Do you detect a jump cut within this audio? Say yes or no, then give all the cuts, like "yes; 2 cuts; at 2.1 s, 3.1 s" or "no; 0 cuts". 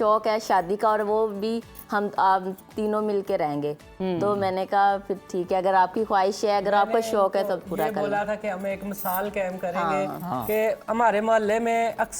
no; 0 cuts